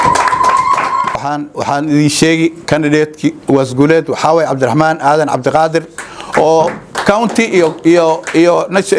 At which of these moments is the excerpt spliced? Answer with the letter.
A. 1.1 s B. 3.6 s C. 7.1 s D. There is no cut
A